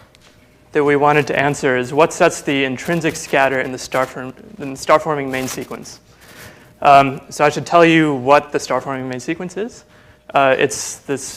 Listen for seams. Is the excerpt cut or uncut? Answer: uncut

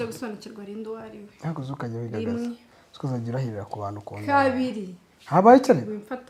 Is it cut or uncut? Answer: uncut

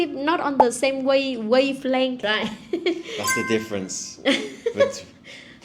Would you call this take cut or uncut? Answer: cut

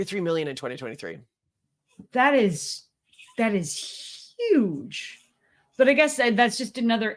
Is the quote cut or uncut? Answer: uncut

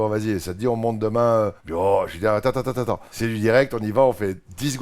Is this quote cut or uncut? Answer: cut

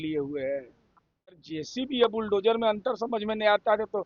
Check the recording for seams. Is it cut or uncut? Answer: cut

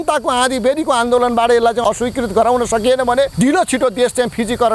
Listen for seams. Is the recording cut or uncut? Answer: cut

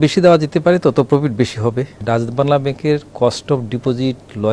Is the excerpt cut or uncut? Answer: cut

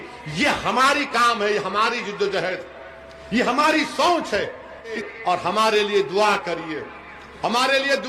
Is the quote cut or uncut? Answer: cut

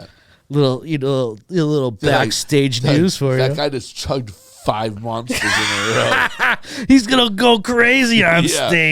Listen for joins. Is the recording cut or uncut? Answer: uncut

